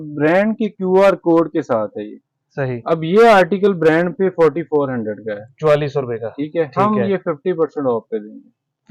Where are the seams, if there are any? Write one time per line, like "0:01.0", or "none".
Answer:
none